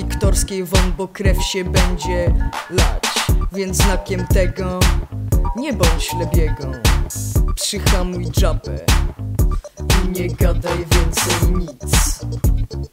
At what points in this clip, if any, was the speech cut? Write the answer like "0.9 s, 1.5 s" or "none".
11.8 s